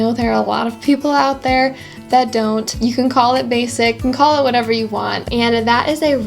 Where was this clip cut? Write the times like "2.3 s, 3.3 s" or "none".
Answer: 2.7 s, 5.2 s